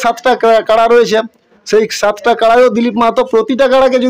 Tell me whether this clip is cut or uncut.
uncut